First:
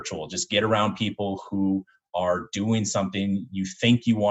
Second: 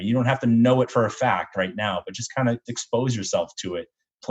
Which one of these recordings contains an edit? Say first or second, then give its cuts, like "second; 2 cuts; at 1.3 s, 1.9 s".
second; 1 cut; at 2.7 s